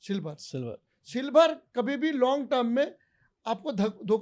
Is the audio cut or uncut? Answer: uncut